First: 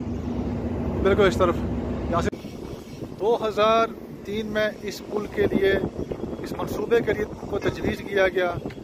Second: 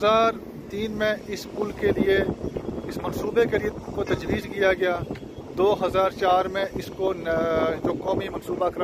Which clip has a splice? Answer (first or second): first